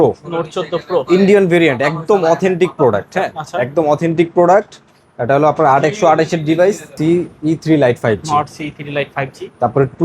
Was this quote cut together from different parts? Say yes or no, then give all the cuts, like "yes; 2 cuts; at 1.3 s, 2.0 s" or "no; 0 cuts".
yes; 1 cut; at 6.9 s